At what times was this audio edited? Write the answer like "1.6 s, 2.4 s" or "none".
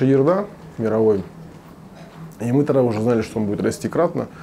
none